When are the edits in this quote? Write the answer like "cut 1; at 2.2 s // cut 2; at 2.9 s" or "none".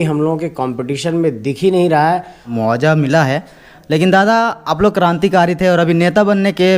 cut 1; at 2.4 s